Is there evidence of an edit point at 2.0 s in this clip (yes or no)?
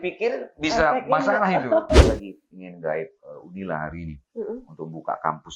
yes